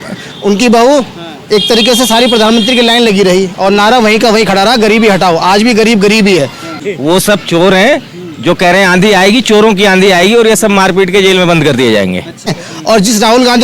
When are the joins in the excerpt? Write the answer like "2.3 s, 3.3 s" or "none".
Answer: 6.7 s, 12.5 s

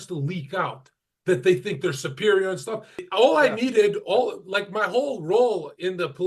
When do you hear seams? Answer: 3.0 s

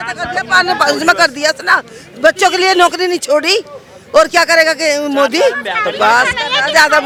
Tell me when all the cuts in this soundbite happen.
none

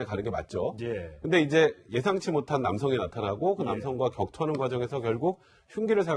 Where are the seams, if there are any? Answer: none

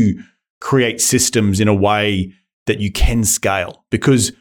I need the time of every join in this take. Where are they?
none

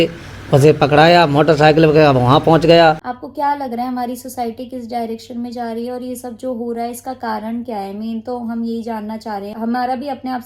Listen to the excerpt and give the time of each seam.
3.1 s, 9.5 s

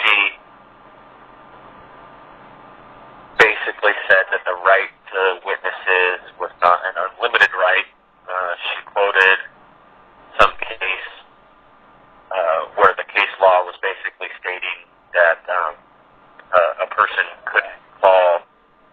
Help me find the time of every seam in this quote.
6.6 s

